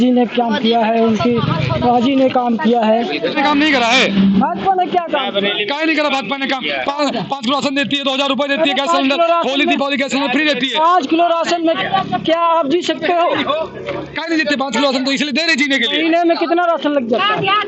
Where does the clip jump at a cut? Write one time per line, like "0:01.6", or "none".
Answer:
0:03.3